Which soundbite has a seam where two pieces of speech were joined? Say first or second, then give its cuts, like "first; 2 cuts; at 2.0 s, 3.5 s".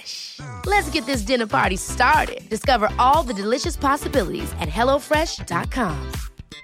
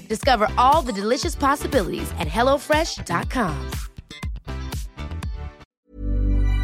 second; 1 cut; at 5.7 s